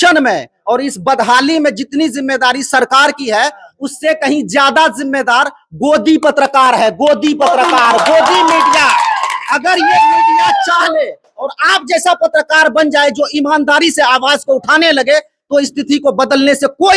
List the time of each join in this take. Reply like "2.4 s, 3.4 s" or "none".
none